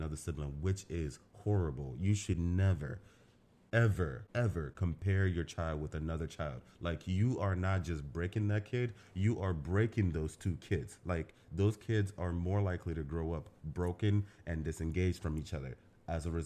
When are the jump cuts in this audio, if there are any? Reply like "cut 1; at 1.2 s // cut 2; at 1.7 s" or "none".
none